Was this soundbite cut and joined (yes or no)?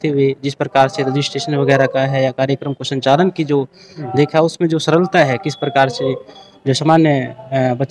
no